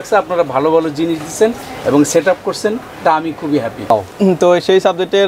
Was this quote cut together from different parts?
yes; 1 cut; at 3.9 s

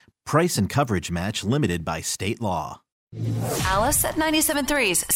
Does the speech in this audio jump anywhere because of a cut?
yes; 1 cut; at 3.1 s

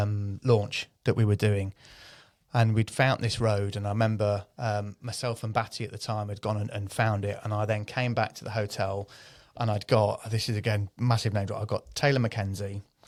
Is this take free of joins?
yes; 0 cuts

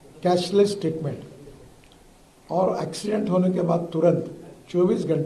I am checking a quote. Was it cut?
no; 0 cuts

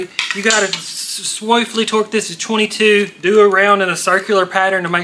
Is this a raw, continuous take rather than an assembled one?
yes; 0 cuts

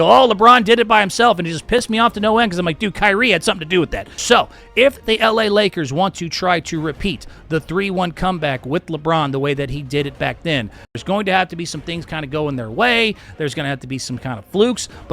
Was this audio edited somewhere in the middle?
yes; 2 cuts; at 4.1 s, 10.9 s

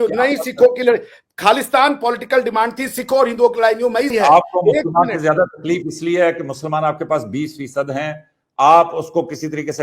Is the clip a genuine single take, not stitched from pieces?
no; 1 cut; at 4.1 s

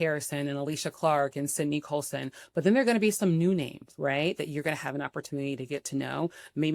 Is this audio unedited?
yes; 0 cuts

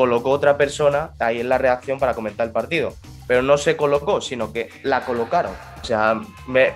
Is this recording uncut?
no; 1 cut; at 5.9 s

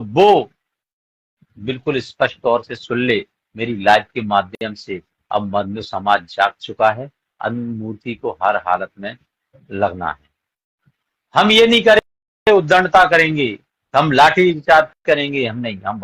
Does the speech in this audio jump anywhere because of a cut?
no; 0 cuts

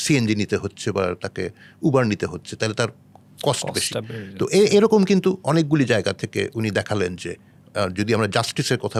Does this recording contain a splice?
no; 0 cuts

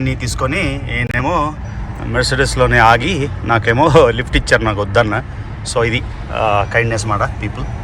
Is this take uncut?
yes; 0 cuts

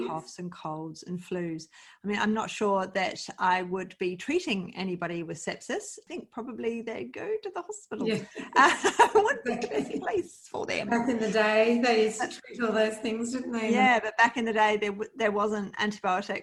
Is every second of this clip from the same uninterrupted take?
yes; 0 cuts

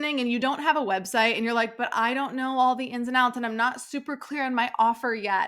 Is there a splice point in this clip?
no; 0 cuts

